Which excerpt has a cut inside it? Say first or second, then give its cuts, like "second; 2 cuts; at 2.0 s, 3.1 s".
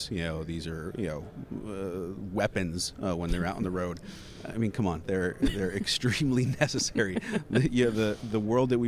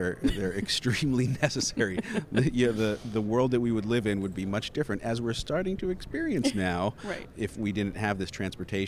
second; 1 cut; at 7.2 s